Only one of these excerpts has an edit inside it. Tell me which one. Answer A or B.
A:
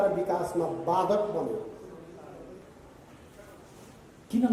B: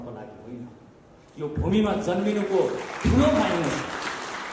A